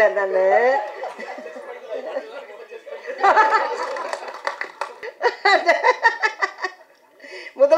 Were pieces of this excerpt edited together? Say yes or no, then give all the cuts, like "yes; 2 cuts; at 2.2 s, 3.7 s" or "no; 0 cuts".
yes; 1 cut; at 5.0 s